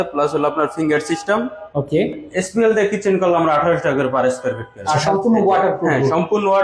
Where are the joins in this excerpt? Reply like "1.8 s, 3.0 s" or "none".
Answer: 2.2 s, 5.0 s